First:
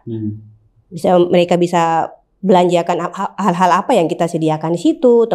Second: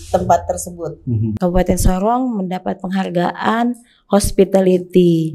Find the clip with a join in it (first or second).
second